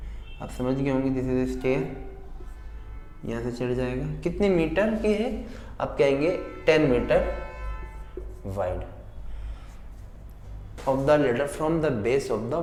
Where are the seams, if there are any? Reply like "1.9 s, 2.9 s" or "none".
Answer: none